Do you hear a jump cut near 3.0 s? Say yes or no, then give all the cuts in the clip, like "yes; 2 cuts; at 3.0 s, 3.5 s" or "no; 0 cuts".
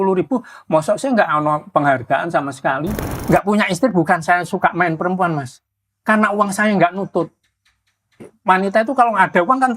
yes; 1 cut; at 3.0 s